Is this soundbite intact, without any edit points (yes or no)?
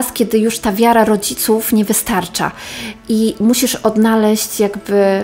yes